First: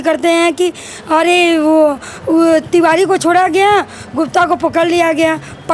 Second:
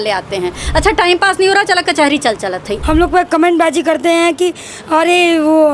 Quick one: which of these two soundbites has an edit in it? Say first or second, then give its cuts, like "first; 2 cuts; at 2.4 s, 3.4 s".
second; 1 cut; at 2.7 s